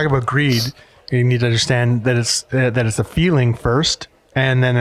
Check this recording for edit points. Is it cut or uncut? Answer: uncut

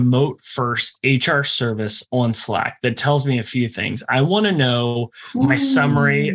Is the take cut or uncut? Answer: uncut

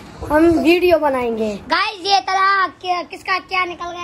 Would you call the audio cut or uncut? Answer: cut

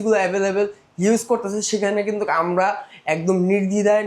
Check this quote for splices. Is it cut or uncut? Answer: uncut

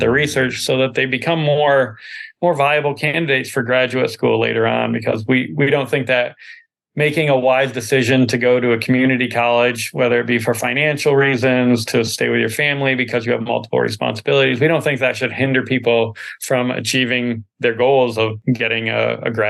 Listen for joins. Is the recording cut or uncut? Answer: cut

